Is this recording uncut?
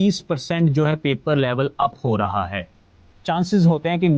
no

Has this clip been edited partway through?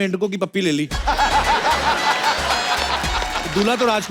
no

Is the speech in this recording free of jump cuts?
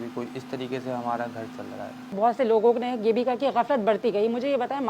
no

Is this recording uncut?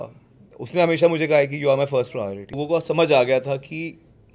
no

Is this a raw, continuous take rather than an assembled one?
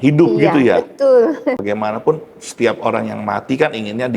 no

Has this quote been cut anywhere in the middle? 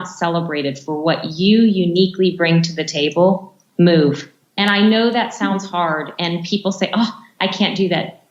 no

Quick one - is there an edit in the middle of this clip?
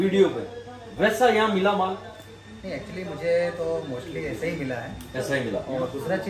no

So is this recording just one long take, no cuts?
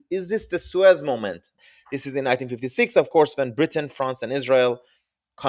no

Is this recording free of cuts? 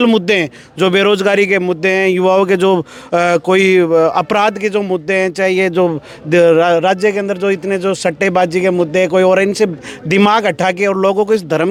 yes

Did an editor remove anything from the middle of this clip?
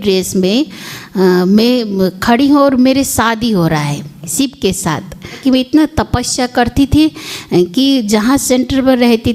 yes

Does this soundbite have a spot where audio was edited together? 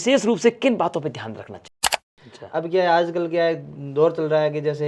yes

